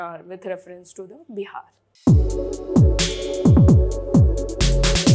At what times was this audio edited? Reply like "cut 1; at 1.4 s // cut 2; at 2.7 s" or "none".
cut 1; at 2.0 s